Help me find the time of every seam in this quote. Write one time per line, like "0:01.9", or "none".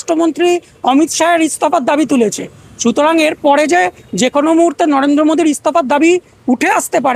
none